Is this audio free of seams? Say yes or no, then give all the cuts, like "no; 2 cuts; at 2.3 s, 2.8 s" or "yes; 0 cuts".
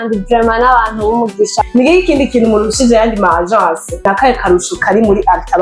no; 2 cuts; at 1.7 s, 4.0 s